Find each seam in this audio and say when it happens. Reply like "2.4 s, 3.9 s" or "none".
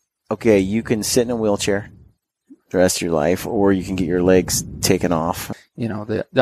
5.5 s